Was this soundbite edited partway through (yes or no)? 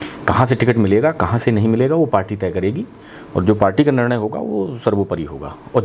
no